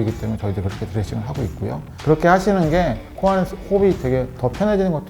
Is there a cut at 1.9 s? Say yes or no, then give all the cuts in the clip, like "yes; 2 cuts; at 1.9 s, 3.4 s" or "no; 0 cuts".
yes; 1 cut; at 1.9 s